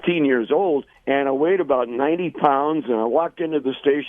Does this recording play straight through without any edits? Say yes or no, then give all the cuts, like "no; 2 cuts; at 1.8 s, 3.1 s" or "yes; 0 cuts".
no; 1 cut; at 0.9 s